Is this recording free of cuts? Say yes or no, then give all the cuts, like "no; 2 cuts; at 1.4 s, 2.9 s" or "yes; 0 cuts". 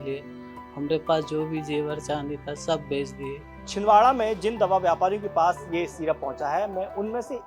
no; 1 cut; at 3.7 s